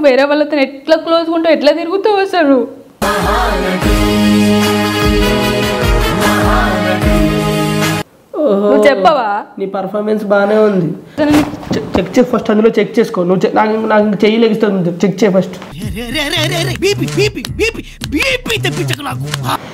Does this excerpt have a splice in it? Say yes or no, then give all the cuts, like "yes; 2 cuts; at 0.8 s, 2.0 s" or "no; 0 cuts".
no; 0 cuts